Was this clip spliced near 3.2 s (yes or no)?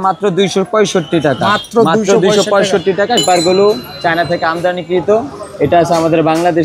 yes